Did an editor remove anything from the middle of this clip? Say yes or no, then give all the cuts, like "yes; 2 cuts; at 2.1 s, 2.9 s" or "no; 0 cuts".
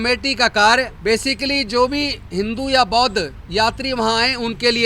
yes; 1 cut; at 0.9 s